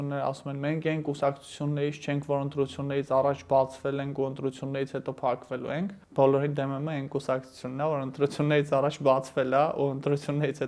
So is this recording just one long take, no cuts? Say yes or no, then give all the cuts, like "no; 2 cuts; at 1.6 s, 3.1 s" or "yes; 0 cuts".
no; 1 cut; at 6.0 s